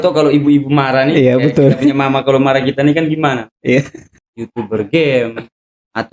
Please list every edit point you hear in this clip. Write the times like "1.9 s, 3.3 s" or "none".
4.0 s